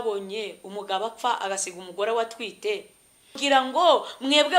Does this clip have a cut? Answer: yes; 1 cut; at 3.4 s

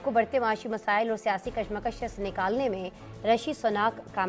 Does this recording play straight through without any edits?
yes; 0 cuts

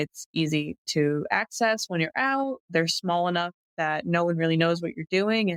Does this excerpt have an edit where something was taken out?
no; 0 cuts

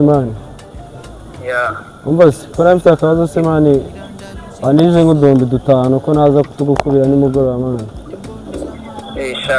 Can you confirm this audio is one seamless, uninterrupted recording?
yes; 0 cuts

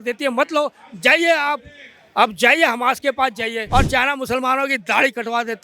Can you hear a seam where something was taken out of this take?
yes; 1 cut; at 3.6 s

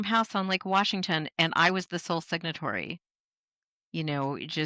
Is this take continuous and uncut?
yes; 0 cuts

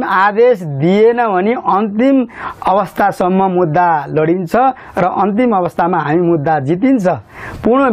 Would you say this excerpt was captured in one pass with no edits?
yes; 0 cuts

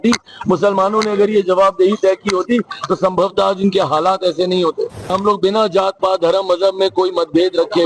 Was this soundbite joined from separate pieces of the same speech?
yes; 1 cut; at 5.1 s

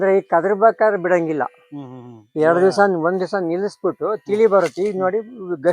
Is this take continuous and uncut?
yes; 0 cuts

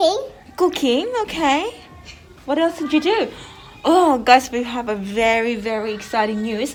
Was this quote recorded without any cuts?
yes; 0 cuts

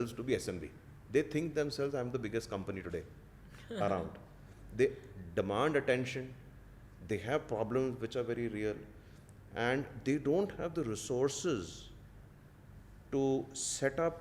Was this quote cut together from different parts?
no; 0 cuts

